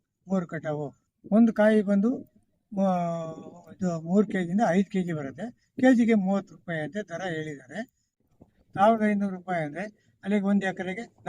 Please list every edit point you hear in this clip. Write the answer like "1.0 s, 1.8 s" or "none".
8.2 s